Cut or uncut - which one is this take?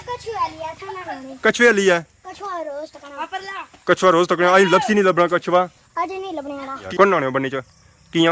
cut